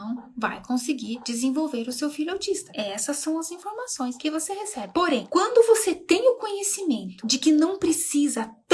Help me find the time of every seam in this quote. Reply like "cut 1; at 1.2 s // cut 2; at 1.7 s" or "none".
cut 1; at 4.7 s